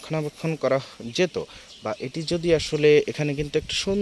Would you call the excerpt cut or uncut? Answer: uncut